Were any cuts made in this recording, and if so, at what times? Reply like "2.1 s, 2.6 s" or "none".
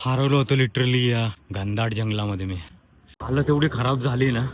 1.4 s